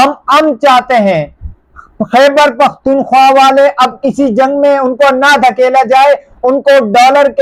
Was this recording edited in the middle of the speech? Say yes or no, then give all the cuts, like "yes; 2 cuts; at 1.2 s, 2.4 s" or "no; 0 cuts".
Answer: no; 0 cuts